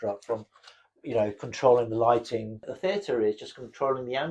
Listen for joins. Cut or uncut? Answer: cut